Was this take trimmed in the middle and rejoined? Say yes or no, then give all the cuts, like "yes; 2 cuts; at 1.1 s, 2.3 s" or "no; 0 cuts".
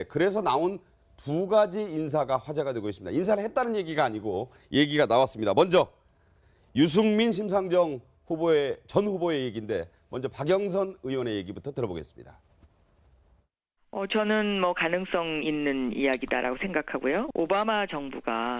no; 0 cuts